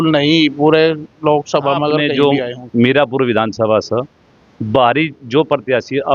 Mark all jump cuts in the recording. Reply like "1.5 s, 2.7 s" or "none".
2.1 s

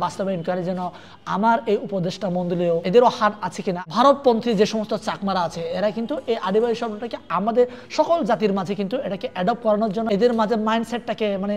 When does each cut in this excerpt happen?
2.8 s, 3.8 s, 10.1 s

